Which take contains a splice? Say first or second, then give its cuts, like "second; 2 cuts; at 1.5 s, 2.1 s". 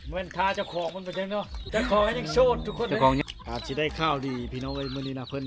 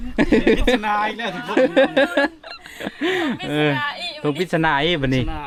first; 2 cuts; at 1.7 s, 3.2 s